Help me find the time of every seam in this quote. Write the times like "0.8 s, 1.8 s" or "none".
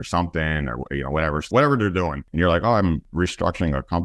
1.5 s, 2.2 s, 3.0 s

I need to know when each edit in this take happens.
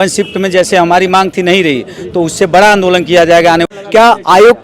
3.7 s

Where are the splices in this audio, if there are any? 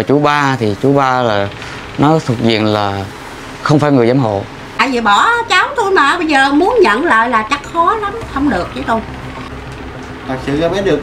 4.6 s, 9.5 s

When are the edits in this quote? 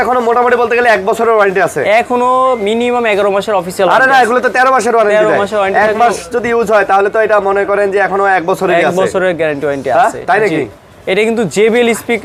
none

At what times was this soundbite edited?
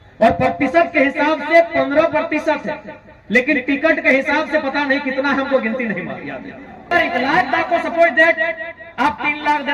6.9 s

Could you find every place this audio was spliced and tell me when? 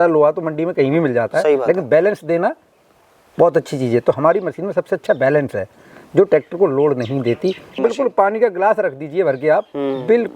7.8 s

